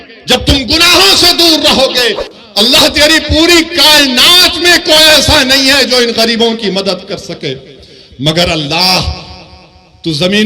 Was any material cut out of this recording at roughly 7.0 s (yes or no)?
no